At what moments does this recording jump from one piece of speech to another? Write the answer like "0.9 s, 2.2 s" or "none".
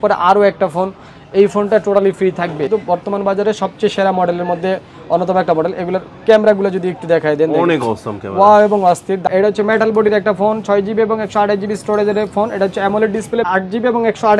2.7 s, 9.2 s, 13.4 s